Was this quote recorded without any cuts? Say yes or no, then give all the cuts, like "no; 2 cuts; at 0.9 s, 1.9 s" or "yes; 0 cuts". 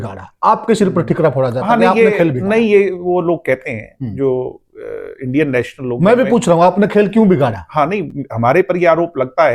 yes; 0 cuts